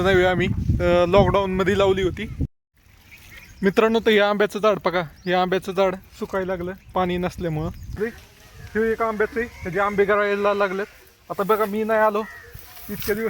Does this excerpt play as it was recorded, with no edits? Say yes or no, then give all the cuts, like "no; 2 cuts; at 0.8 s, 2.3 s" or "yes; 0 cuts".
no; 2 cuts; at 2.4 s, 8.0 s